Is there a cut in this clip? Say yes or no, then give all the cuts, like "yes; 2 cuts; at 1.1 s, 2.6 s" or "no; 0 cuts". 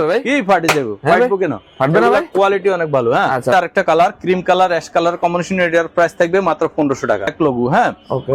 yes; 2 cuts; at 3.5 s, 7.3 s